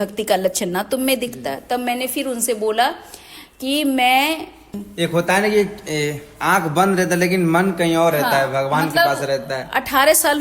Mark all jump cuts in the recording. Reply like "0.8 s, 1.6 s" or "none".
4.8 s